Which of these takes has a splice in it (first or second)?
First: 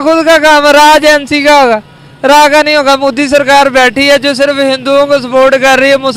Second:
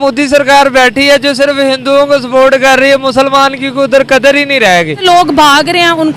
second